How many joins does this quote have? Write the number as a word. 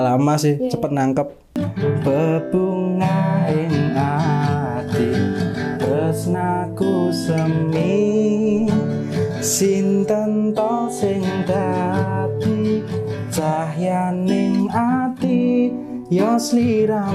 one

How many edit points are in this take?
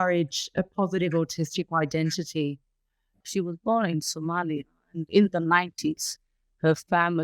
one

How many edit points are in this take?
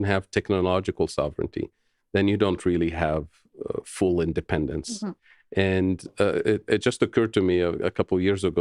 zero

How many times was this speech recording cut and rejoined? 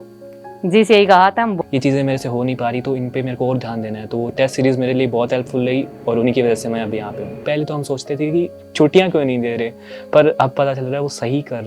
two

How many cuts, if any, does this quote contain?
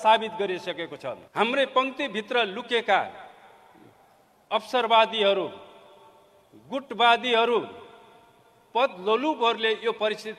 one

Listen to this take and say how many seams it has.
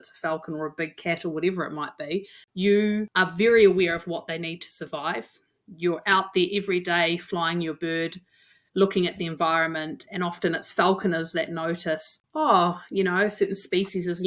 three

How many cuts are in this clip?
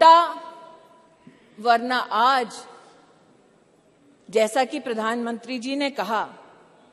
zero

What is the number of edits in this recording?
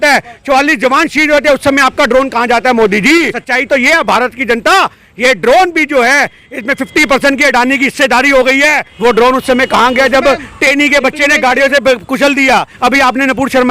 three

